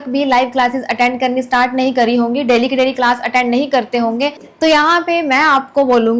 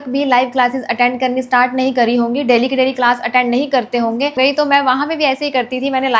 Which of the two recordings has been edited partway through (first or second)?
second